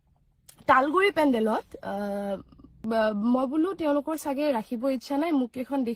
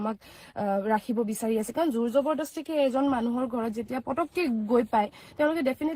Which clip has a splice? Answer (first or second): first